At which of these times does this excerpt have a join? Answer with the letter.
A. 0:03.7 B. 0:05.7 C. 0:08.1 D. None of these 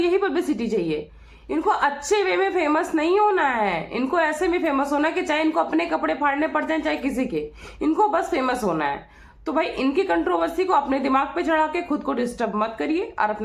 D